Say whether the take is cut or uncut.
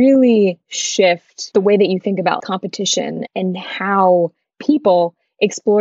cut